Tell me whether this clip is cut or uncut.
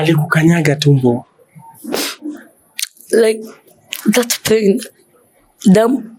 uncut